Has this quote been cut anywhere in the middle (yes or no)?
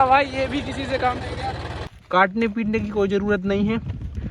yes